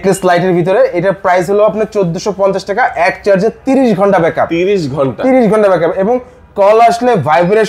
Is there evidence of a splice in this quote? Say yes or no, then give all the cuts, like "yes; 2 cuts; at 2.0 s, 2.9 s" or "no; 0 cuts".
no; 0 cuts